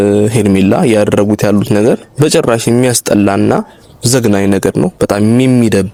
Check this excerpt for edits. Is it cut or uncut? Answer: uncut